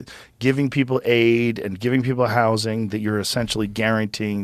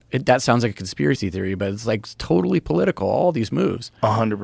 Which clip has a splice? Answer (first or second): second